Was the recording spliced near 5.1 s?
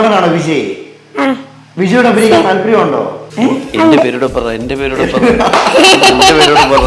no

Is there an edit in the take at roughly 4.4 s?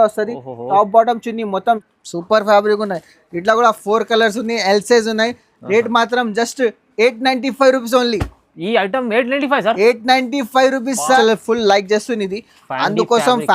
no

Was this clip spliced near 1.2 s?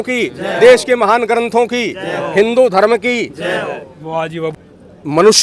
no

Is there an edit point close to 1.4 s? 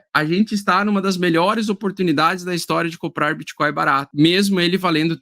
no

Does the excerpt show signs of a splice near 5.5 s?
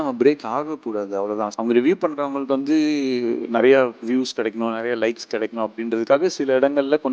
no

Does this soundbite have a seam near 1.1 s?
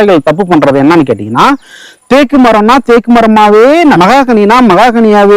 no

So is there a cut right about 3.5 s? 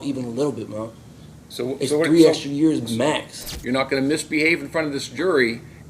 yes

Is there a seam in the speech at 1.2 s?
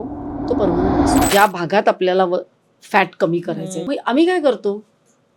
yes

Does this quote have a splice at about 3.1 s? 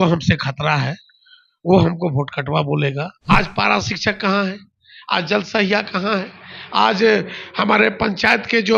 yes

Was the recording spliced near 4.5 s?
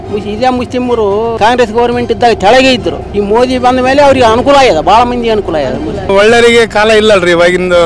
no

